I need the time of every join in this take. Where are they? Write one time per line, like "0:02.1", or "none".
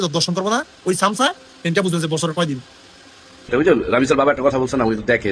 0:03.5